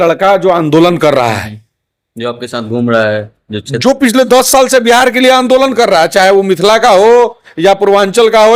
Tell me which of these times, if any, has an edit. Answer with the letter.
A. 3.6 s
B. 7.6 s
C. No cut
C